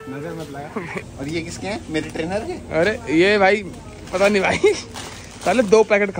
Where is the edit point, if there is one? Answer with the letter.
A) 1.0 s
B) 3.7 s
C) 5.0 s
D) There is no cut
A